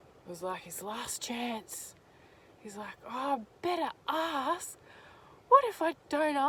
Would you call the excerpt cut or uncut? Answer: uncut